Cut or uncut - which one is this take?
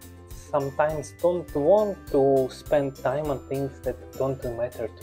cut